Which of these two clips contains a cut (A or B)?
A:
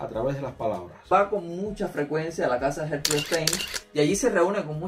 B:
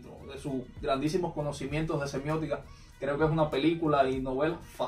A